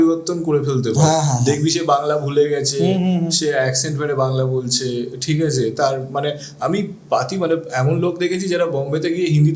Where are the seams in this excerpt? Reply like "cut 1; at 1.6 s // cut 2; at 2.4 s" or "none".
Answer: none